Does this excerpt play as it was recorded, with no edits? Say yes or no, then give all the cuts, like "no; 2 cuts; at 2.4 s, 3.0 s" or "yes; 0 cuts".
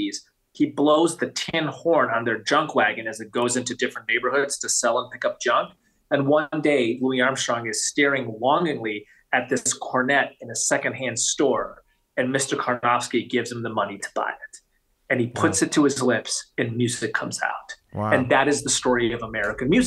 yes; 0 cuts